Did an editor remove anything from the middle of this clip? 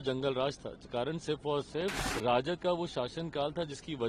yes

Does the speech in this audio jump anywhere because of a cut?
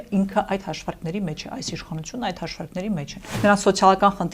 yes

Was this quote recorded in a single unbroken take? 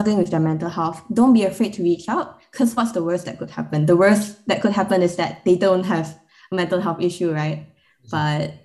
yes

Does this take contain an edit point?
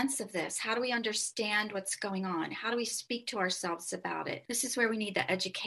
yes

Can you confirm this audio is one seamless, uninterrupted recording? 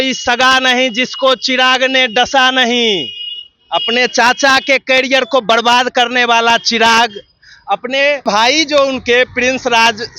no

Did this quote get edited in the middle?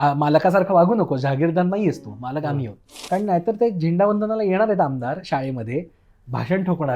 yes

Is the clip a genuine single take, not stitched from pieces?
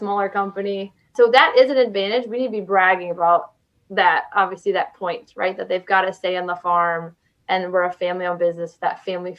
no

